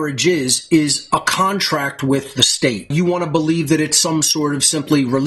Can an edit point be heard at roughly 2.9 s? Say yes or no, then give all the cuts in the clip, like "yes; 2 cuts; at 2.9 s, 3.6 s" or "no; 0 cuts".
yes; 1 cut; at 2.9 s